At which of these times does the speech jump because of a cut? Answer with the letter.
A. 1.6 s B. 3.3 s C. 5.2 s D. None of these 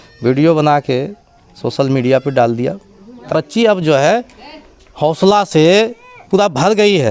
B